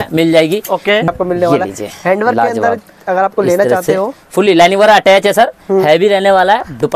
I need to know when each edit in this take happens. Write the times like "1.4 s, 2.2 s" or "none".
1.1 s